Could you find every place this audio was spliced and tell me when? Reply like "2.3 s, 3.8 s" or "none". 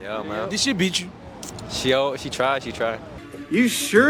none